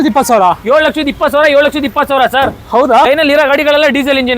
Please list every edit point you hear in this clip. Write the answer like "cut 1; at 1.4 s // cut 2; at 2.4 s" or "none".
cut 1; at 3.1 s